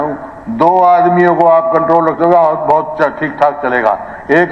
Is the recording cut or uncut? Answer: uncut